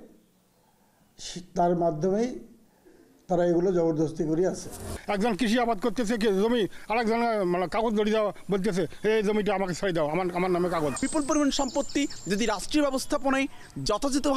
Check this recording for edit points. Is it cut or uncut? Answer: cut